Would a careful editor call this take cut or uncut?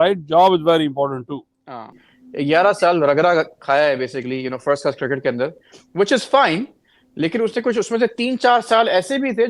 cut